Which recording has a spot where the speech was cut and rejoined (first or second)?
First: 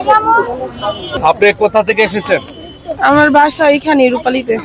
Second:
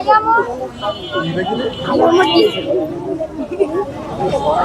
first